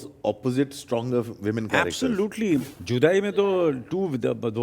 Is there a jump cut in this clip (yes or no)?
yes